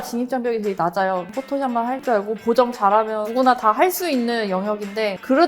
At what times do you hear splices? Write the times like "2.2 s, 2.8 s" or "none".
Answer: 1.5 s